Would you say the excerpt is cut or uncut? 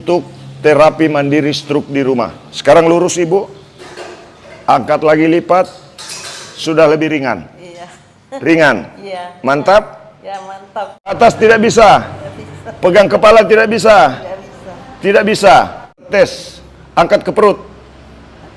cut